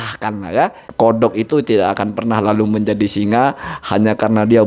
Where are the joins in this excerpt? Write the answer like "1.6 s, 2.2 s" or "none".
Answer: 1.0 s